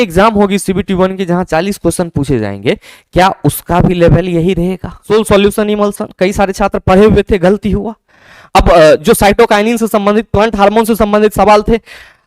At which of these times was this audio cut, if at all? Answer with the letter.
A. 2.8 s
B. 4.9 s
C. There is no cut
B